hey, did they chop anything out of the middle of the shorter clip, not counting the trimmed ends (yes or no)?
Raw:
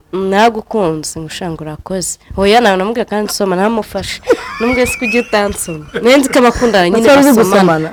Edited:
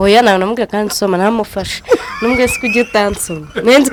no